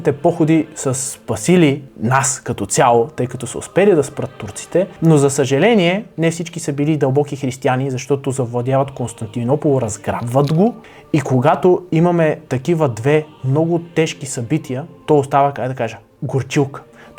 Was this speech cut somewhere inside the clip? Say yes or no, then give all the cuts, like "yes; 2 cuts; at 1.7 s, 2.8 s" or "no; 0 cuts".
yes; 5 cuts; at 1.9 s, 4.9 s, 6.1 s, 10.9 s, 14.9 s